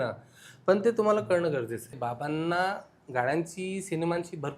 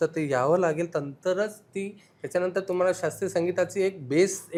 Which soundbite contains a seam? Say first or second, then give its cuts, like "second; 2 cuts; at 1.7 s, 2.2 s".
first; 1 cut; at 2.0 s